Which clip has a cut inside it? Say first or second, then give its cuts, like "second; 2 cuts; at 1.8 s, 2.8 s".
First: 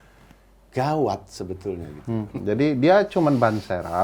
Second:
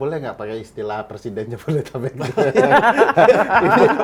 first; 1 cut; at 2.3 s